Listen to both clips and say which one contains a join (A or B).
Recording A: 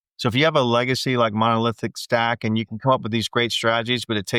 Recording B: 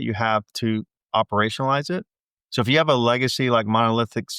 B